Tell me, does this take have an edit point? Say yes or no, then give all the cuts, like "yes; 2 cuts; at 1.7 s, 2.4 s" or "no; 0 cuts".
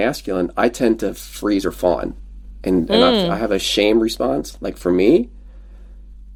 no; 0 cuts